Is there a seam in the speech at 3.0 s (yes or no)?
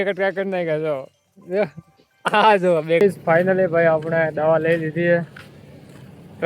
yes